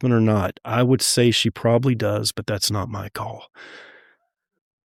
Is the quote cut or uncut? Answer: uncut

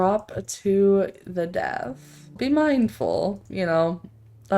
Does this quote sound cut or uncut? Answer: cut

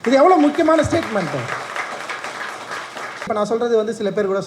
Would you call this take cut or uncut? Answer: cut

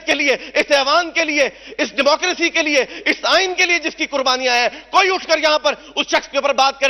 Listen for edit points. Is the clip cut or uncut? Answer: uncut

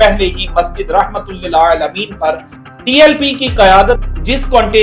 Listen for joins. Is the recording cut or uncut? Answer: cut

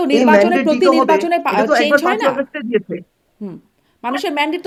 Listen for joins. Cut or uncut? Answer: uncut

